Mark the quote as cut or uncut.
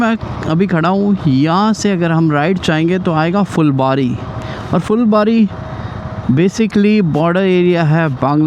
uncut